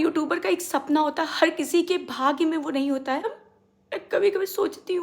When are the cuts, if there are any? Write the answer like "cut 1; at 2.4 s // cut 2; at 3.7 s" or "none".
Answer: cut 1; at 3.4 s